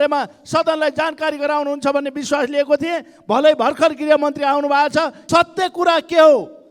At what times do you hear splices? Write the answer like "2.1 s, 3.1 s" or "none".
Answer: 5.2 s